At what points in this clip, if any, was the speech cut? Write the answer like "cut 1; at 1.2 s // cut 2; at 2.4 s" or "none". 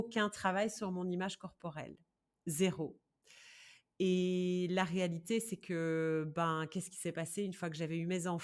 none